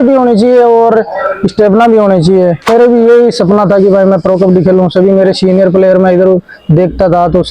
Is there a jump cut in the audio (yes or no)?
yes